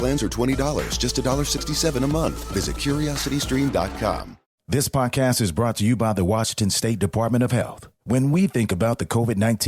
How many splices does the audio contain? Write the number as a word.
one